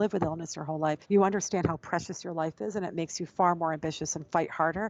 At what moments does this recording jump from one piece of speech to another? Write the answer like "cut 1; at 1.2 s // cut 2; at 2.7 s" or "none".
cut 1; at 1.0 s